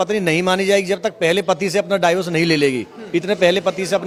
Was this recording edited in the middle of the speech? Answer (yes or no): no